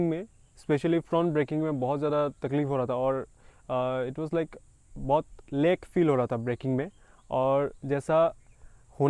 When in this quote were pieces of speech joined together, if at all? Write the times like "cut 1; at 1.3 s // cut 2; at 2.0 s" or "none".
none

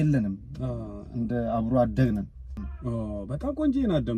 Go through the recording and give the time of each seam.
cut 1; at 2.6 s

